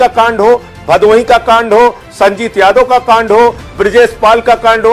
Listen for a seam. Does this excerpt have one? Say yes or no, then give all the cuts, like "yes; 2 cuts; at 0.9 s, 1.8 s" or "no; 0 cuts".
no; 0 cuts